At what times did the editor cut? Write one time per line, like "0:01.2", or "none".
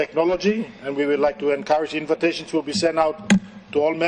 none